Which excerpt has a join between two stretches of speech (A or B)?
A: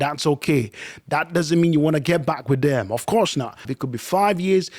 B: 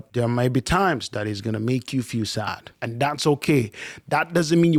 A